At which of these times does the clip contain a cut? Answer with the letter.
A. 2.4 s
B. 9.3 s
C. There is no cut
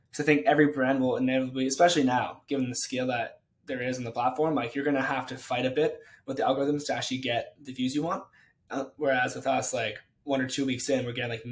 C